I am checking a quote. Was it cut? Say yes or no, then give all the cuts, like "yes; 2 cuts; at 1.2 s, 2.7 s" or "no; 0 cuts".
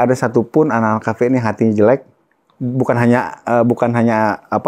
no; 0 cuts